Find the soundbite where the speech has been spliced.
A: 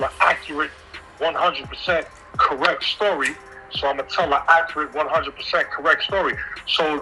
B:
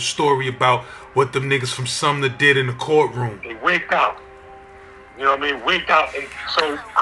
B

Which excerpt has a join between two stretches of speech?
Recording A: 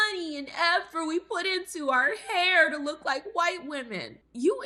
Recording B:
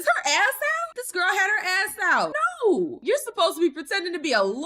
B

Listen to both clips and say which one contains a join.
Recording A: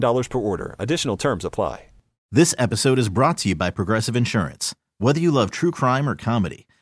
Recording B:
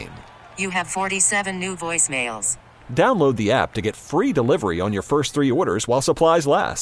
A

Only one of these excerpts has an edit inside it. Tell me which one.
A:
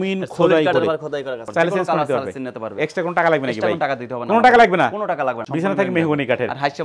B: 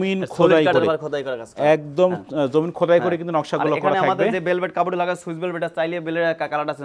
A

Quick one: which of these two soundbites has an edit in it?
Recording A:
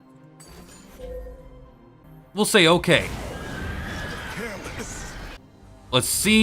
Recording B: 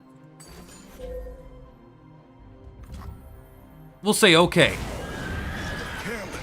A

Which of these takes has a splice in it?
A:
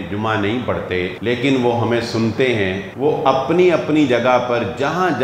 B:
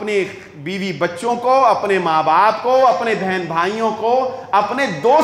A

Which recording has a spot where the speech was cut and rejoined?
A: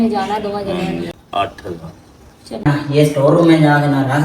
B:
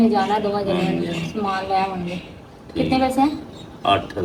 A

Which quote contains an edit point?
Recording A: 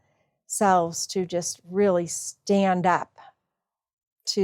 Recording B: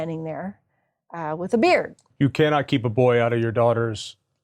B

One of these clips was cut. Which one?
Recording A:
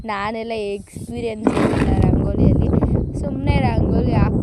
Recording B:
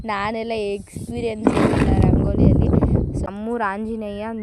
B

